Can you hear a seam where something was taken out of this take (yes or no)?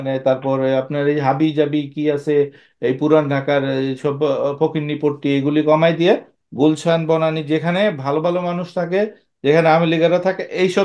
no